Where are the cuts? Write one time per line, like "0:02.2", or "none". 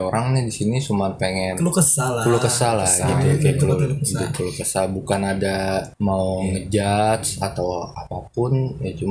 0:01.5
0:05.9